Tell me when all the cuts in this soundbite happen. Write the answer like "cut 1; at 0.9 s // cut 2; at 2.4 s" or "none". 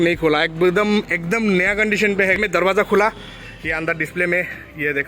cut 1; at 2.4 s